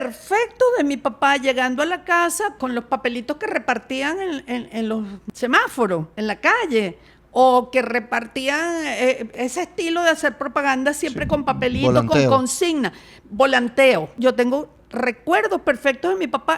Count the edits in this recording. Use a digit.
5